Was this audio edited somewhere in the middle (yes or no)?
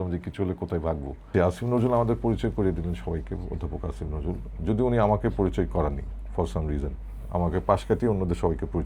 yes